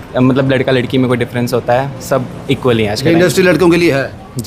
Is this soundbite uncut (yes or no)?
yes